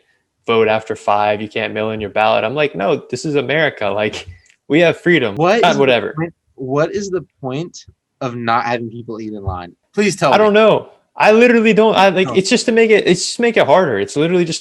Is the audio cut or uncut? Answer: cut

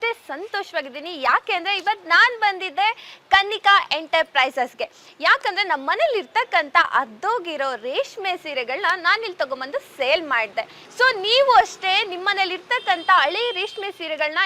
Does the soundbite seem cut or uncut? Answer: cut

